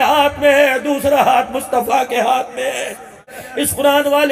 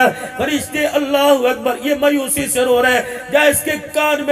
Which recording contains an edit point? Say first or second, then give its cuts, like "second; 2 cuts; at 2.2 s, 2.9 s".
first; 1 cut; at 3.4 s